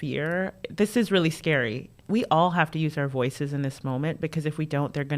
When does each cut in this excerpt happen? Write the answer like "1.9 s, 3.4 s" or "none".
2.0 s

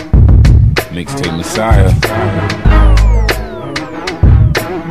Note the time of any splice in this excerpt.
3.4 s

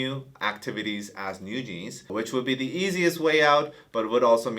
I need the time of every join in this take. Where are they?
2.1 s

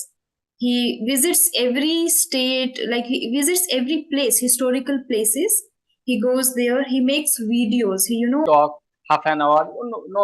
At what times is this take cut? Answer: 8.5 s

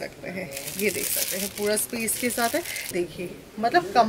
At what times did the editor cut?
2.9 s

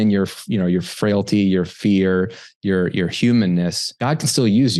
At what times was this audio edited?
3.9 s

